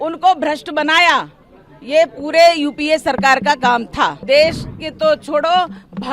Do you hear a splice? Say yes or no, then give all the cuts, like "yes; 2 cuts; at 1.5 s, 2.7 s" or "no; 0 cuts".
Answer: yes; 1 cut; at 4.2 s